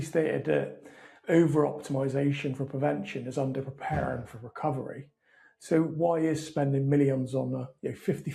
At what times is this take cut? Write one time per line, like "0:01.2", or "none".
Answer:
none

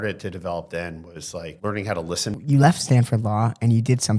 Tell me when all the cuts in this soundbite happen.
0:01.5
0:02.3

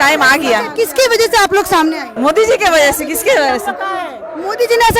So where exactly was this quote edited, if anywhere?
0:02.1

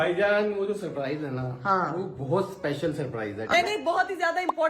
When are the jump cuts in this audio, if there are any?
0:03.5

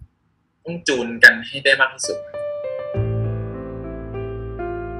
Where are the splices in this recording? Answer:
0:02.1

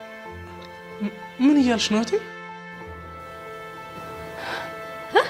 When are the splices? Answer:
none

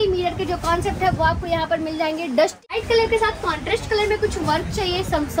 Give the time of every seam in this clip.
0:02.6

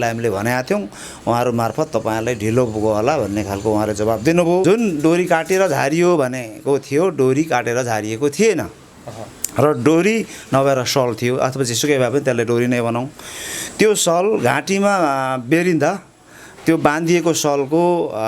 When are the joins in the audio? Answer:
0:04.6

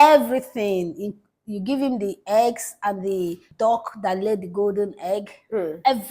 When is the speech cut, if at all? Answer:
0:03.4

